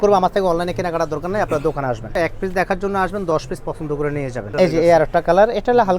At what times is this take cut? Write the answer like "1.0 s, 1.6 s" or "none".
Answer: 2.1 s, 4.5 s